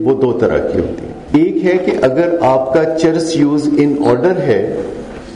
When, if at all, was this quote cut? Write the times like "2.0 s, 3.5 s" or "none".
1.1 s